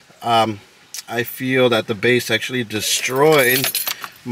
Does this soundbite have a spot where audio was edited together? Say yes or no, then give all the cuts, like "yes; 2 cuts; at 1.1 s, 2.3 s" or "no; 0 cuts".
no; 0 cuts